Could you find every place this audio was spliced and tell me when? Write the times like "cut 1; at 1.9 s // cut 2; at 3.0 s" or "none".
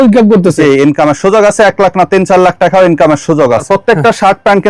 cut 1; at 3.6 s